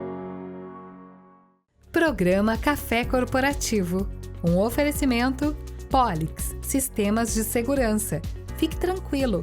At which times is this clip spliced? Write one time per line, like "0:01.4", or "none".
0:01.6